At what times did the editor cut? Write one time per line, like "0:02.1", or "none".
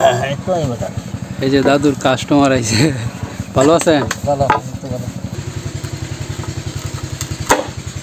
0:05.3